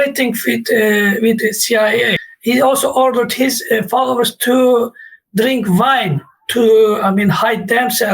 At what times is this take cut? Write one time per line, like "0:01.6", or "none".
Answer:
0:02.2